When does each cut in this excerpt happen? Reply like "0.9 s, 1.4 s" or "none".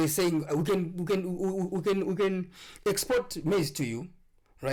none

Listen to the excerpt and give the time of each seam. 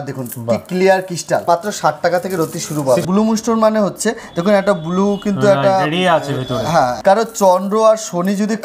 1.4 s, 3.1 s, 7.0 s

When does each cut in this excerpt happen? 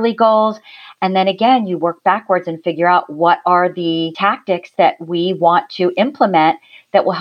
4.1 s

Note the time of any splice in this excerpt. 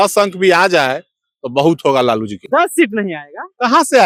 none

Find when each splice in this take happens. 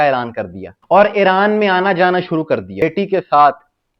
2.8 s

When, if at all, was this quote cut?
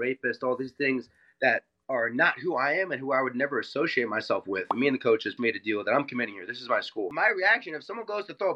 4.7 s, 7.1 s

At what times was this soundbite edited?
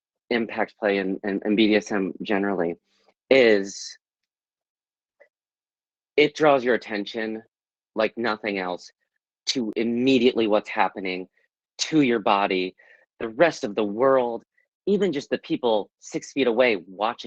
none

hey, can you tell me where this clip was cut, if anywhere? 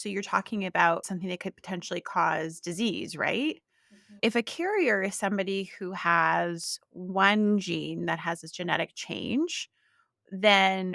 none

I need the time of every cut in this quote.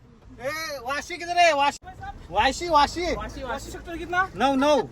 1.8 s

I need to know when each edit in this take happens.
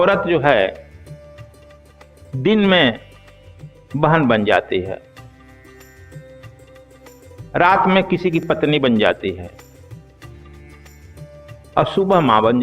none

